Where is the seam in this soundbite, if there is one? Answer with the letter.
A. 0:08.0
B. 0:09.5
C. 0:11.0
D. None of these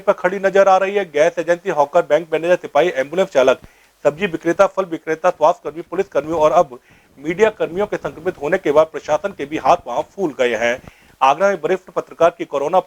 B